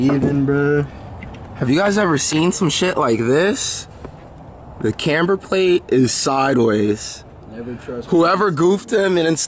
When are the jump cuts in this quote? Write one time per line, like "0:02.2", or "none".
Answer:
none